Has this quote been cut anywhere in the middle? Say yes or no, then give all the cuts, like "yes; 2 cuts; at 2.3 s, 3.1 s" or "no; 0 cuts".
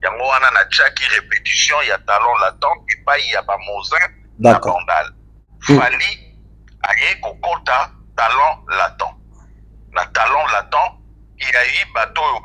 yes; 1 cut; at 5.5 s